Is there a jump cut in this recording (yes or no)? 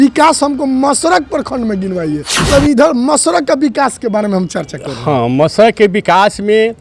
yes